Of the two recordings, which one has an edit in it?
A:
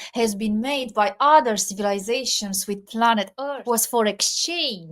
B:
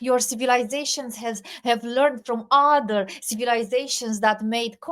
A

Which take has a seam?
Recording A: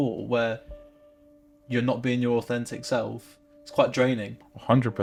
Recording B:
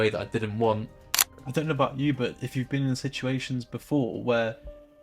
B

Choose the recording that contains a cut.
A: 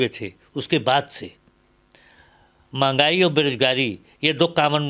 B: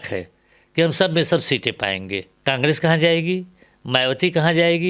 B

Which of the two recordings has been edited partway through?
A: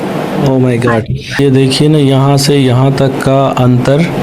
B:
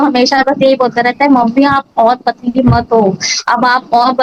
A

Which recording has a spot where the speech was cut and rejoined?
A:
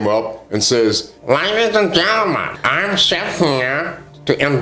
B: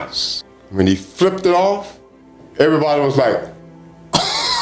A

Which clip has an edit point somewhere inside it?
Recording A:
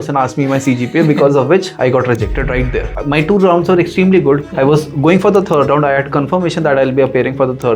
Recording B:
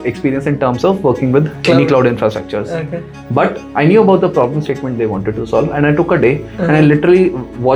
A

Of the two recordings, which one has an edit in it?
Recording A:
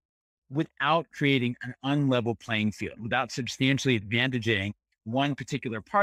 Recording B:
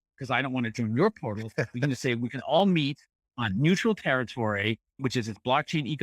B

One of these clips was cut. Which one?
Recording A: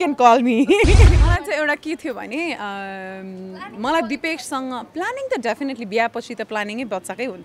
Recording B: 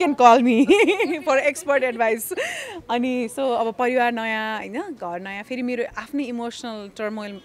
A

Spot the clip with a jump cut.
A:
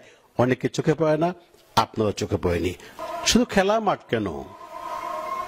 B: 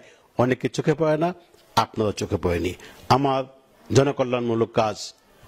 A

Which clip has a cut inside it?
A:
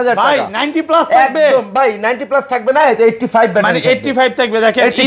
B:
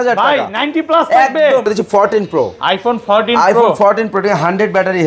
B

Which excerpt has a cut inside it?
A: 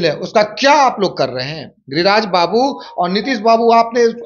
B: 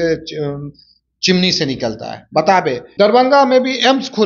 B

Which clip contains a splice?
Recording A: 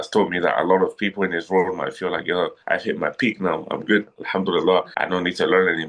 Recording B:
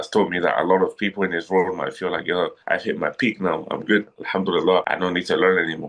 B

